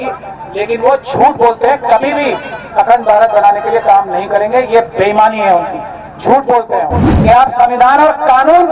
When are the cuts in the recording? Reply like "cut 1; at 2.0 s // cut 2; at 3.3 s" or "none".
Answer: cut 1; at 7.1 s